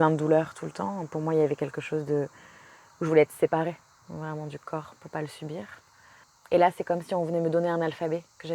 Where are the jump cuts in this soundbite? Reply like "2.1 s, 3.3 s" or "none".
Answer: none